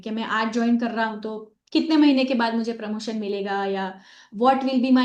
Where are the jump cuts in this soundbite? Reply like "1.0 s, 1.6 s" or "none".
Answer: none